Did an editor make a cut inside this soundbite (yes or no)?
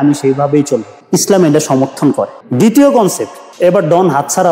no